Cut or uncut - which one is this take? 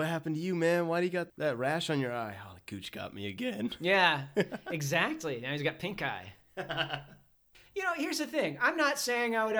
cut